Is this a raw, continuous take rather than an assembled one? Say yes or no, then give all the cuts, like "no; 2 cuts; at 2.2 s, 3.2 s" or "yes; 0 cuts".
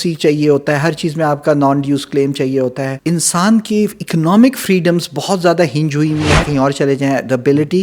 no; 2 cuts; at 2.9 s, 6.5 s